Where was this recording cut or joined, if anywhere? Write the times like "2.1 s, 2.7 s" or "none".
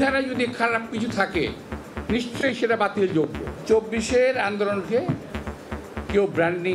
3.5 s